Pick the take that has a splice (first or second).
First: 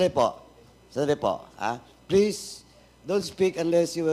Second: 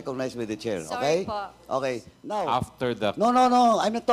second